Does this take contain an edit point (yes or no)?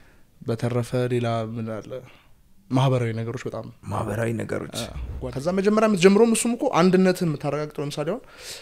yes